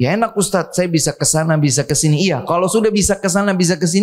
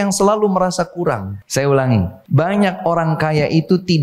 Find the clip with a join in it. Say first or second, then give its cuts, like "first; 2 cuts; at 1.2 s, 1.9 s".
second; 2 cuts; at 1.3 s, 2.2 s